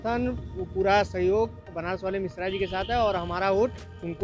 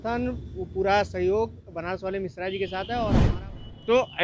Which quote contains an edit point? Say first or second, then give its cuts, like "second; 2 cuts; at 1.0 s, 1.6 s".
second; 1 cut; at 3.2 s